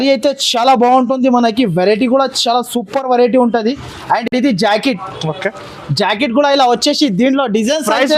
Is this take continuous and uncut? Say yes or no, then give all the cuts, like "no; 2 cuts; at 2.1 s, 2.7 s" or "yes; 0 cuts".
yes; 0 cuts